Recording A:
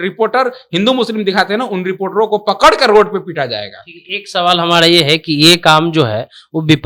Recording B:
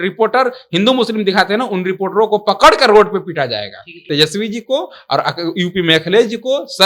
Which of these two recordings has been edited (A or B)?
B